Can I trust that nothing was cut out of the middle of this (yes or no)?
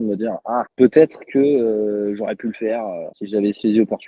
yes